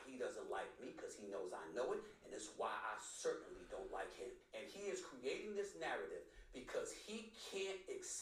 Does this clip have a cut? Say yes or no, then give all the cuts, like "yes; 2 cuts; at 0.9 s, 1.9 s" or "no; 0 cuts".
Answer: yes; 1 cut; at 4.4 s